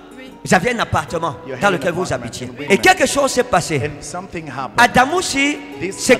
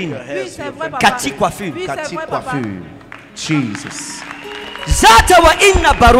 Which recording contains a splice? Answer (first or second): first